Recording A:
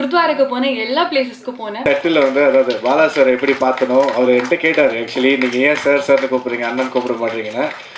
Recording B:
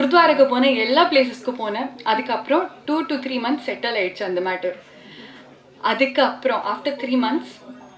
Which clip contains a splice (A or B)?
A